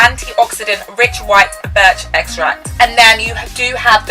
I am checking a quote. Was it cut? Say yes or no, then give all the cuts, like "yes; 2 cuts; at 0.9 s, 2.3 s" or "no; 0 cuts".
yes; 1 cut; at 2.7 s